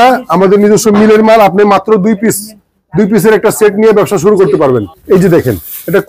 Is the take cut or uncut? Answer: cut